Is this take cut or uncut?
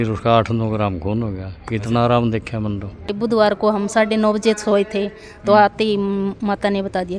cut